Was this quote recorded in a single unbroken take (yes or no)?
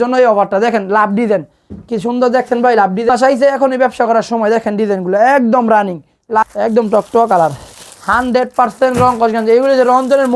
no